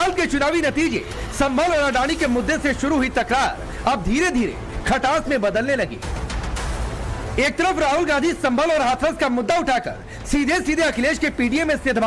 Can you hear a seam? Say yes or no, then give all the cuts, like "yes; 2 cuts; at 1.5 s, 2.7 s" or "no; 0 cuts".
no; 0 cuts